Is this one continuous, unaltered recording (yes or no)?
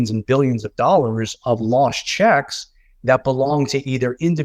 yes